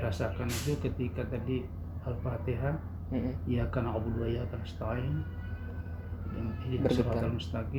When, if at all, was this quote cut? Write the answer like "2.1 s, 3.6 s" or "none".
none